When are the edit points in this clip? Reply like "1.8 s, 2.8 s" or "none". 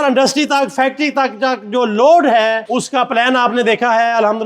2.6 s